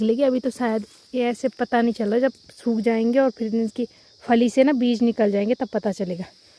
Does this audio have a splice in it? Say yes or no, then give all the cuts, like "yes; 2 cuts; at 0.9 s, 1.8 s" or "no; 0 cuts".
no; 0 cuts